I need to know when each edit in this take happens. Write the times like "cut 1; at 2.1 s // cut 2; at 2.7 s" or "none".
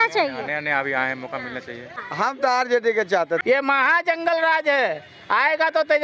cut 1; at 2.0 s // cut 2; at 3.4 s